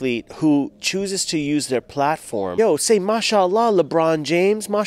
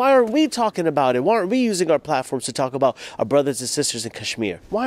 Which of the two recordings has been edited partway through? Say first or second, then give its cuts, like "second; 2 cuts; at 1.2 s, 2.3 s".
first; 1 cut; at 2.5 s